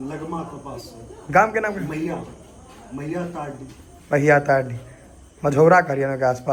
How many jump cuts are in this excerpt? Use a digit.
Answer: 0